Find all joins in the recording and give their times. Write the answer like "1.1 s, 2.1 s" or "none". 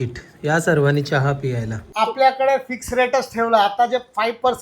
1.9 s